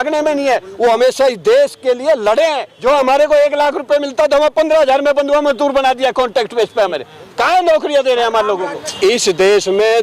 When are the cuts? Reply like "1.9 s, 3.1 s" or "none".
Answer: 2.7 s, 8.8 s